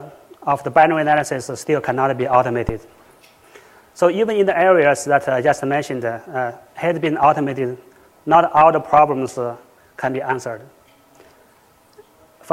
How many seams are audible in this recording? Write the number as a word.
one